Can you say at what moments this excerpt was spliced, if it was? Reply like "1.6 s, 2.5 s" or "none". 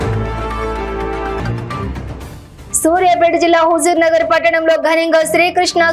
1.4 s